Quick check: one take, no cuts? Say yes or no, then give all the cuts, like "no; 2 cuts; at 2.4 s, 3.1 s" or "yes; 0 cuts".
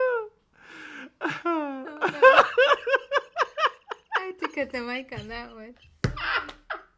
yes; 0 cuts